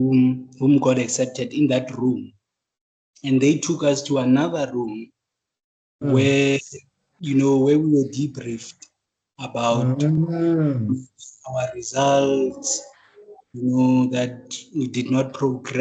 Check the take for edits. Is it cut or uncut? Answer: uncut